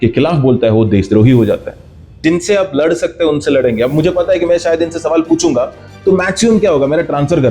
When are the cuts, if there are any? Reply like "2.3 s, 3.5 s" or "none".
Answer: 2.2 s